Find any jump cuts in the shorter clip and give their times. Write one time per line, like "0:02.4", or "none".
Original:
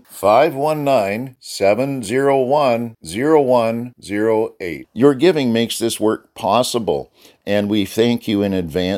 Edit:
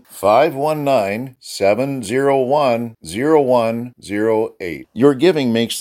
none